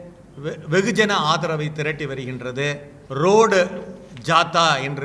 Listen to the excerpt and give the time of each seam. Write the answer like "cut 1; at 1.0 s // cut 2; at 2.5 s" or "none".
cut 1; at 2.9 s